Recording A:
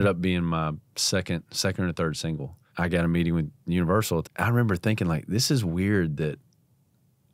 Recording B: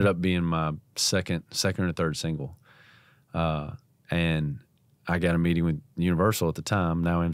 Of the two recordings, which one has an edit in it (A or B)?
A